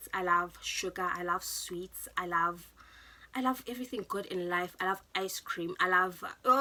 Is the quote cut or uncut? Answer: uncut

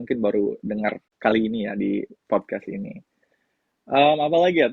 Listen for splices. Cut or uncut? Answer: cut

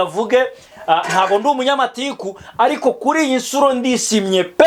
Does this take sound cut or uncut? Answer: uncut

